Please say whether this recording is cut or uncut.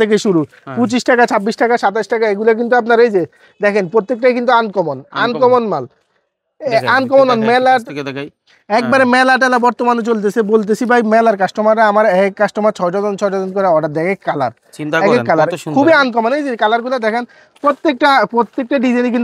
uncut